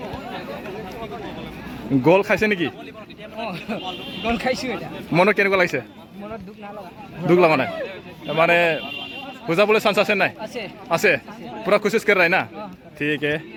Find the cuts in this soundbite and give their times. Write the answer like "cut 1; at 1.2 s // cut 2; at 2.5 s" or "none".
none